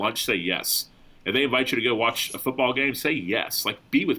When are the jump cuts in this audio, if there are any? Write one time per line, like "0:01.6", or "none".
none